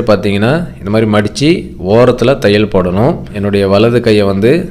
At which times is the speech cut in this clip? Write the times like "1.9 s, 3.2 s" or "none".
3.3 s